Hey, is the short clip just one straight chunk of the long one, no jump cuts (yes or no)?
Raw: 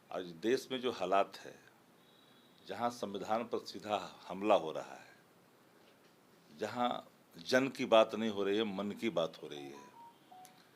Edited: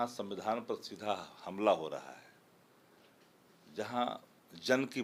yes